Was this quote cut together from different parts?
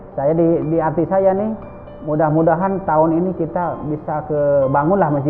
no; 0 cuts

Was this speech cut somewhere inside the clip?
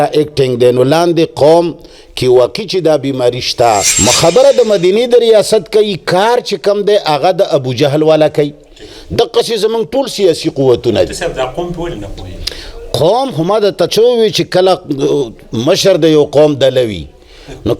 yes; 1 cut; at 3.9 s

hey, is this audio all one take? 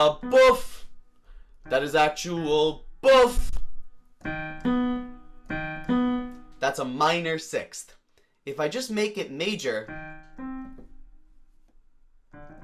yes; 0 cuts

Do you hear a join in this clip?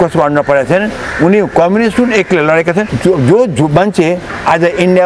yes; 1 cut; at 2.9 s

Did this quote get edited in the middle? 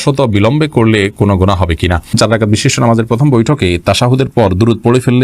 yes; 1 cut; at 2.1 s

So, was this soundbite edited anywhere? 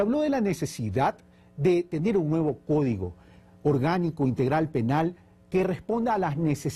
yes; 1 cut; at 3.4 s

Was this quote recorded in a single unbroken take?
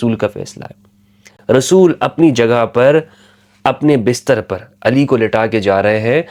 yes; 0 cuts

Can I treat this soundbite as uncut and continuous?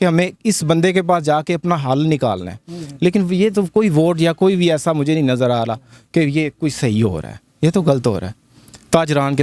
yes; 0 cuts

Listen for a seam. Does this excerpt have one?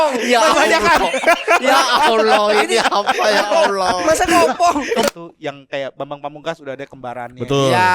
yes; 1 cut; at 5.1 s

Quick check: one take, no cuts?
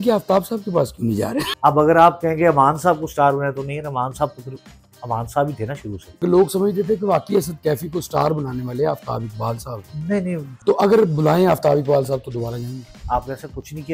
no; 4 cuts; at 1.5 s, 6.2 s, 10.5 s, 12.9 s

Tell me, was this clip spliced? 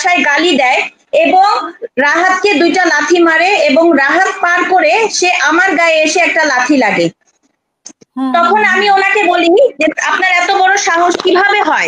no; 0 cuts

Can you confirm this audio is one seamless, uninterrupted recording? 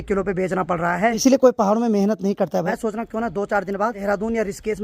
no; 3 cuts; at 1.2 s, 2.7 s, 4.0 s

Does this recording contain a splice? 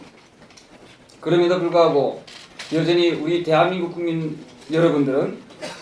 yes; 1 cut; at 4.0 s

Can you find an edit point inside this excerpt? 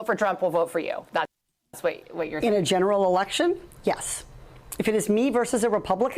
no; 0 cuts

